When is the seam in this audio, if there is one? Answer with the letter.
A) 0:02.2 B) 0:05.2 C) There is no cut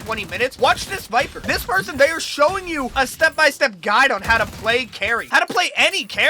B